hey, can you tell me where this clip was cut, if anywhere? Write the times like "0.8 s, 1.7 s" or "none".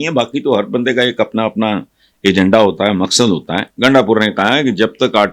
3.6 s